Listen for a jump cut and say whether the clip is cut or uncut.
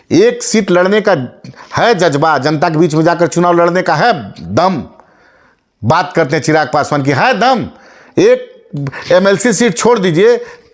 uncut